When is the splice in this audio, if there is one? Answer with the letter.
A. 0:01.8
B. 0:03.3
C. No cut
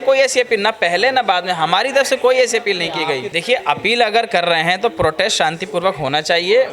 B